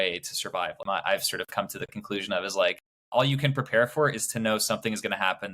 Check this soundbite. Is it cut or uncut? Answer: cut